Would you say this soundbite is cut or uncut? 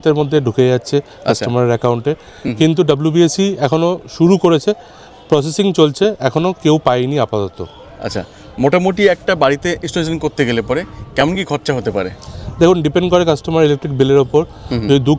uncut